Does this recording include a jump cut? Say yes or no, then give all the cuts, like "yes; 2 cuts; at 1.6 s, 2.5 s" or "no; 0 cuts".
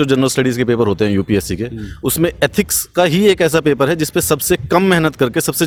no; 0 cuts